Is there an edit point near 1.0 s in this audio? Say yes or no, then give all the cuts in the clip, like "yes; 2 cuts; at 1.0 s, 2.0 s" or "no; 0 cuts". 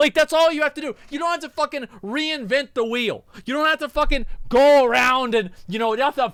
no; 0 cuts